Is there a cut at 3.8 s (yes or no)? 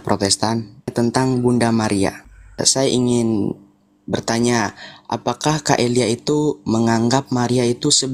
no